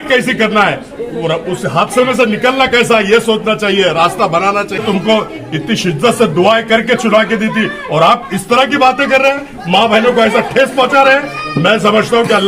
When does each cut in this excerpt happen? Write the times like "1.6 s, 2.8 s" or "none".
4.8 s